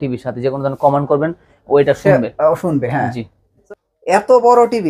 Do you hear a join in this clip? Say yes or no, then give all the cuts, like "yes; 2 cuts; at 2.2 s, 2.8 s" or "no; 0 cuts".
yes; 1 cut; at 3.6 s